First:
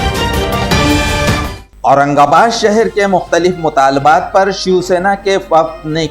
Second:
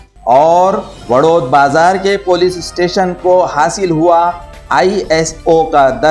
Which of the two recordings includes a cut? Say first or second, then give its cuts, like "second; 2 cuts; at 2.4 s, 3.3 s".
first; 1 cut; at 1.6 s